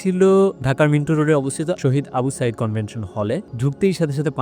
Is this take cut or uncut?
cut